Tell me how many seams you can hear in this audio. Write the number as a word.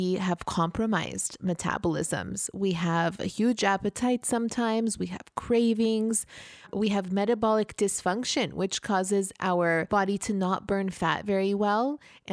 two